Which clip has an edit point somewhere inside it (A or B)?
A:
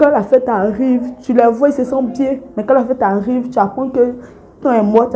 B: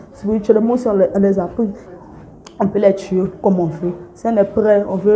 B